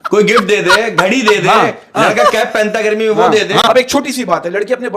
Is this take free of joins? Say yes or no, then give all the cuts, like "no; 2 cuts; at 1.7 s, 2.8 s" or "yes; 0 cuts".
no; 1 cut; at 3.6 s